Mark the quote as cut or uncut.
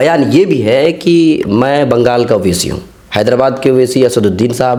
uncut